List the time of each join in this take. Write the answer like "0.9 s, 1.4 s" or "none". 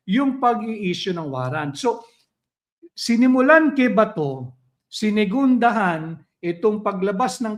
none

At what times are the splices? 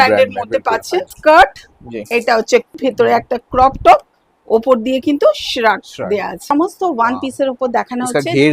1.1 s, 2.7 s, 6.5 s

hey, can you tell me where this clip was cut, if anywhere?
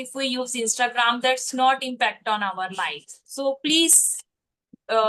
none

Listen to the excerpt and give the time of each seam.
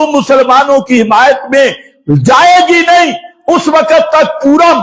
none

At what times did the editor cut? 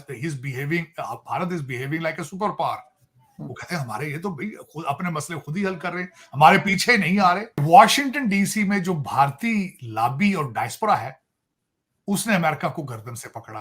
7.6 s

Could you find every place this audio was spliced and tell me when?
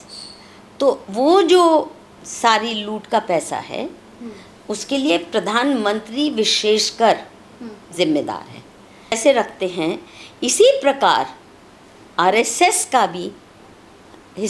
9.1 s

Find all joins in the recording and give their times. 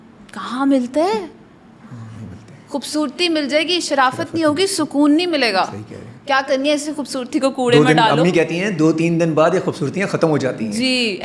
none

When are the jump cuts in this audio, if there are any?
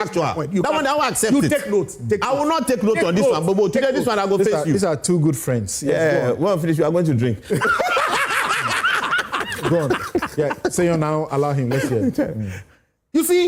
none

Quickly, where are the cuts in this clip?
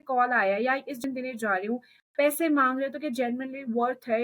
1.0 s

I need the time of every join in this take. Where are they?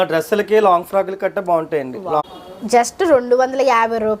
2.2 s

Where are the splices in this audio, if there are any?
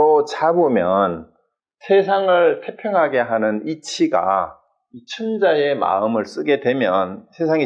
none

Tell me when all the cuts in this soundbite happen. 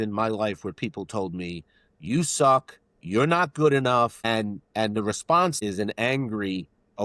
4.2 s, 5.6 s

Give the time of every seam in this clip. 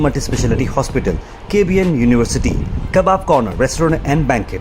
none

